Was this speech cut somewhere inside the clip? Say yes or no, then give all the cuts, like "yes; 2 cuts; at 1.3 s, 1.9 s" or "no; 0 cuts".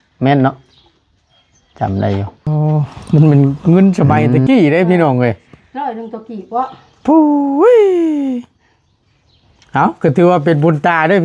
yes; 1 cut; at 2.5 s